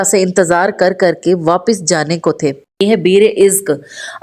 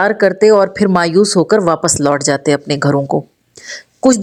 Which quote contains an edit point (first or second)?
first